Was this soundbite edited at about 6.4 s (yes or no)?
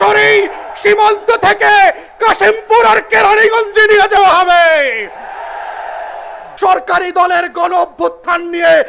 yes